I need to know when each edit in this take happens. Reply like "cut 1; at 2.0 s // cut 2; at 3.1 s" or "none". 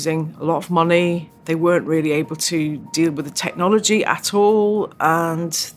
cut 1; at 1.3 s